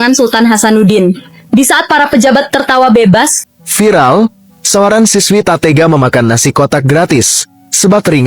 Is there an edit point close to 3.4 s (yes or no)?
yes